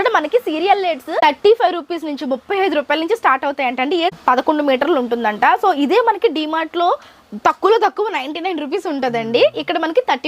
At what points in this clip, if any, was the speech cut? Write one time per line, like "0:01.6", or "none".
0:01.2
0:04.1